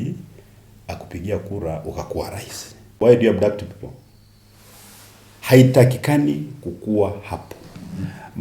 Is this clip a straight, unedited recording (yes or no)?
no